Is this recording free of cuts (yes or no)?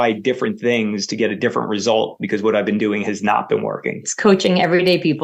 yes